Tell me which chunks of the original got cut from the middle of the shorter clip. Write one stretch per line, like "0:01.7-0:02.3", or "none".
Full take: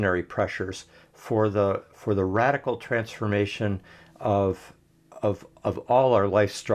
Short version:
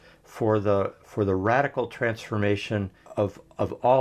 0:03.9-0:05.0